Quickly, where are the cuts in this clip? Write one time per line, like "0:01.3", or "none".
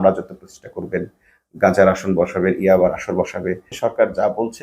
0:03.7